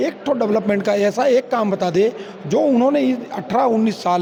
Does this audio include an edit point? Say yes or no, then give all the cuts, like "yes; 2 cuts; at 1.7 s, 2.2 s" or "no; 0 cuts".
no; 0 cuts